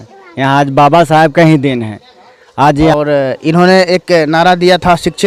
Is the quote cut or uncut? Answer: cut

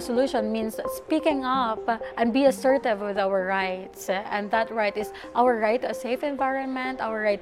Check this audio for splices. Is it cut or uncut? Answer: uncut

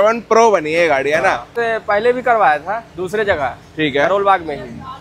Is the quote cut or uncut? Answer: cut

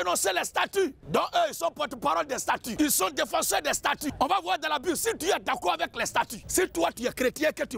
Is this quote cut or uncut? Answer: cut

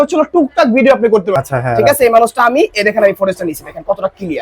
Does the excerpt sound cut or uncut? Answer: cut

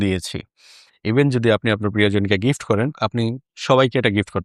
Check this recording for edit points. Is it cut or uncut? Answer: cut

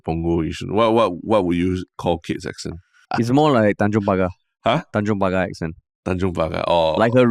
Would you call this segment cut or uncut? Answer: cut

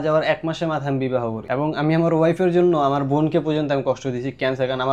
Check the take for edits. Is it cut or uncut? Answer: cut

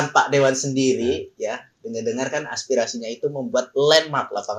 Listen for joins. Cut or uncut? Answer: uncut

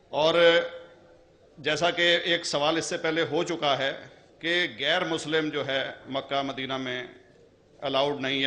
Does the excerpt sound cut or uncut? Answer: cut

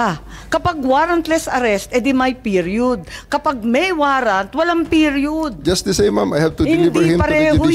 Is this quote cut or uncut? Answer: uncut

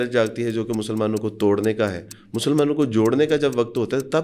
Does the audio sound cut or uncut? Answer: uncut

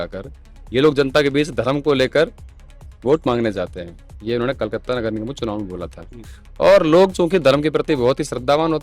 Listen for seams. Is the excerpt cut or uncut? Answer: uncut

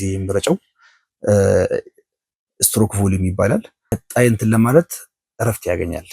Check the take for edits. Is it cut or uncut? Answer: cut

